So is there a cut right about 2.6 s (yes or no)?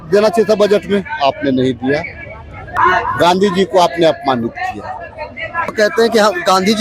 yes